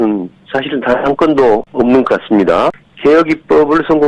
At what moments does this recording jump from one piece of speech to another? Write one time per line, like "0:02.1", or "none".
0:01.7
0:02.8